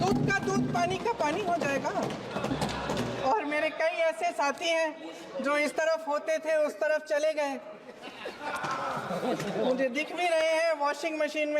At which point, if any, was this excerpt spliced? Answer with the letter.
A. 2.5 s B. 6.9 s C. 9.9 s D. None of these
A